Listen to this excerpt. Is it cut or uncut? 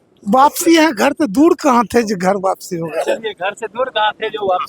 uncut